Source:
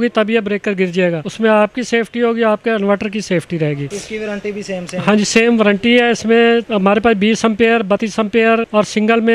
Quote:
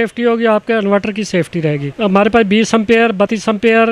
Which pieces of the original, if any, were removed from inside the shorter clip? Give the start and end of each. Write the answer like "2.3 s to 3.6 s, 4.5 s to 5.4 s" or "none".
3.9 s to 6.7 s